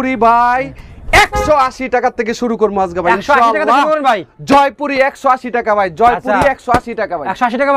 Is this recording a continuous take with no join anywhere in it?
yes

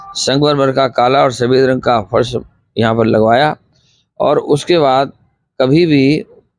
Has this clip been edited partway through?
no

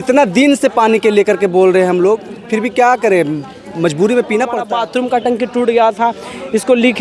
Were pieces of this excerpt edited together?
yes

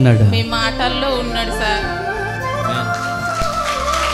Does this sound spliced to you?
no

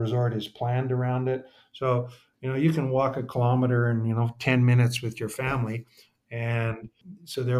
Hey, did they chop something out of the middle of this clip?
no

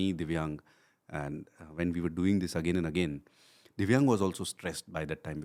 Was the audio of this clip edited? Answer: no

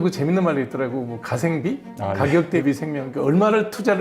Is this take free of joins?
no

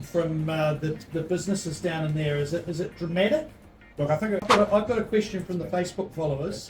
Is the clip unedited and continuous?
no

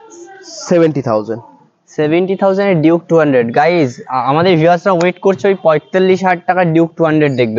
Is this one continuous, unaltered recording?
yes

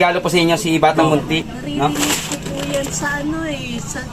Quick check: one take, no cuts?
no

